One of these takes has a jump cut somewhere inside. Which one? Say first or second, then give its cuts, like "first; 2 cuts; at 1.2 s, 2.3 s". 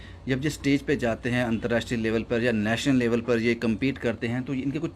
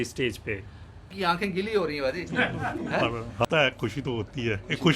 second; 2 cuts; at 1.1 s, 3.4 s